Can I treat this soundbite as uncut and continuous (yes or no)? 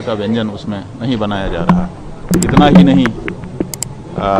no